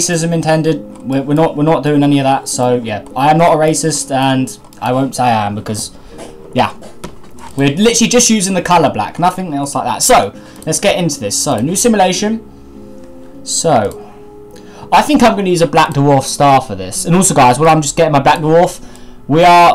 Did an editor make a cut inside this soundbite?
no; 0 cuts

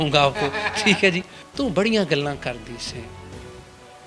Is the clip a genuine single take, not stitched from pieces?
no; 1 cut; at 1.4 s

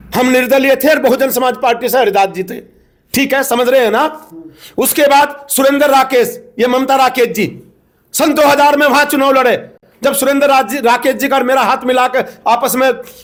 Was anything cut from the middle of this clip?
no; 0 cuts

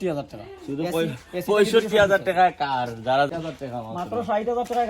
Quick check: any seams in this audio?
yes; 1 cut; at 3.3 s

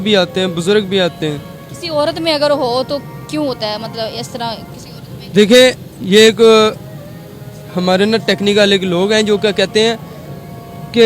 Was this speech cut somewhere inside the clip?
no; 0 cuts

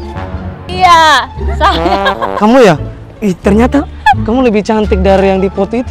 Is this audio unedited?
yes; 0 cuts

